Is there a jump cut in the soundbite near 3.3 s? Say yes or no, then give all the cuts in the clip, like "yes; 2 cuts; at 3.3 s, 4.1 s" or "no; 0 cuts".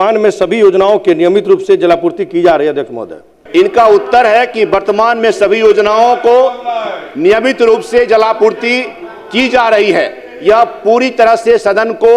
yes; 1 cut; at 3.3 s